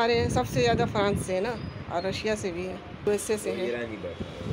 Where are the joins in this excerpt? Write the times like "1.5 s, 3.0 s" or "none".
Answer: 3.1 s